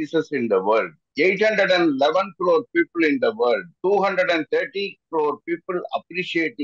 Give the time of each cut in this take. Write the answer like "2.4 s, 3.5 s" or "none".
1.0 s